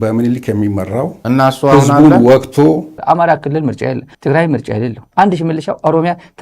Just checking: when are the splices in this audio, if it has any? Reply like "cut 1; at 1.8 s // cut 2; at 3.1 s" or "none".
cut 1; at 1.2 s // cut 2; at 2.9 s // cut 3; at 5.1 s